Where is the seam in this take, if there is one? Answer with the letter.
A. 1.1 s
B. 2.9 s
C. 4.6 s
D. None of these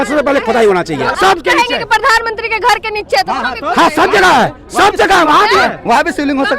A